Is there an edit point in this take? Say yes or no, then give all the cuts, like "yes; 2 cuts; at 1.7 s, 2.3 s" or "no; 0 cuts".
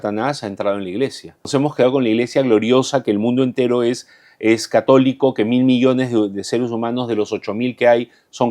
yes; 1 cut; at 1.5 s